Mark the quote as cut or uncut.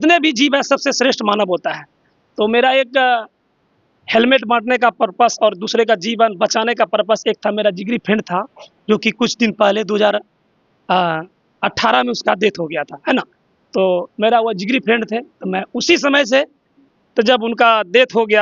uncut